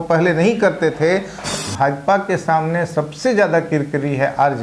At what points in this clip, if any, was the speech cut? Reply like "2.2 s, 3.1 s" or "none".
1.5 s

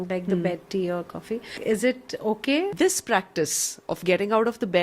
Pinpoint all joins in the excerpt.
1.5 s, 2.7 s

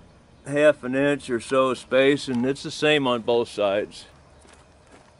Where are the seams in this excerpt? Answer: 4.1 s

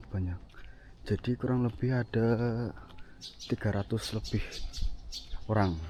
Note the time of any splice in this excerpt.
none

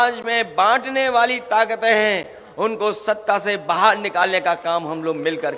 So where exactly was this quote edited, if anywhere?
none

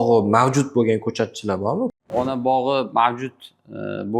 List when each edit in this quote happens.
2.0 s

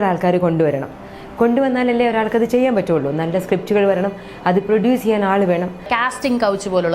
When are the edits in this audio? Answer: 5.9 s

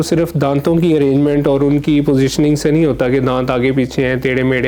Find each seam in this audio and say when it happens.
none

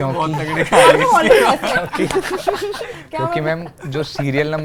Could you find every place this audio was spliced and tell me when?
none

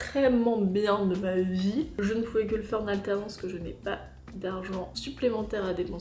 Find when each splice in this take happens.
1.9 s

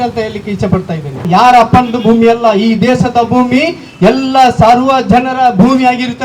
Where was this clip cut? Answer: 1.2 s

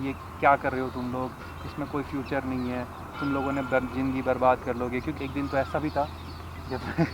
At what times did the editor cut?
5.1 s

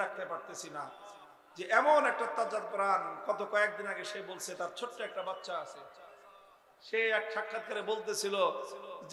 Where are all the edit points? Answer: none

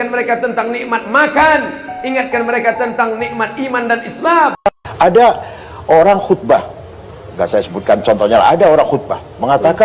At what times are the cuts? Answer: 4.6 s

